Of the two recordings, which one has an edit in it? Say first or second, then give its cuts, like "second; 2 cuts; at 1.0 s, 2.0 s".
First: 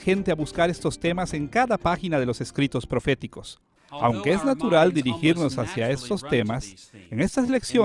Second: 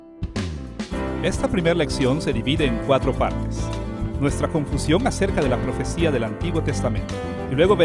first; 1 cut; at 2.1 s